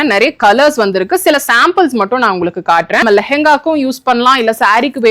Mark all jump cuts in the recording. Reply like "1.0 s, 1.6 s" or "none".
3.0 s

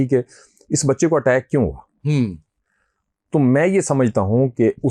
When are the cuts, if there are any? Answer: none

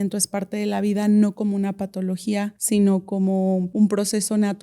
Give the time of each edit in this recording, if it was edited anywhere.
2.6 s, 3.7 s

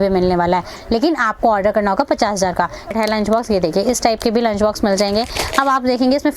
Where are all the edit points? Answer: 2.9 s

